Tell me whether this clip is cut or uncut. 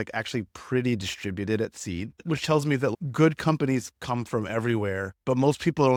uncut